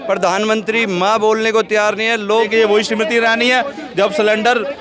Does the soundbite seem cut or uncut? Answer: cut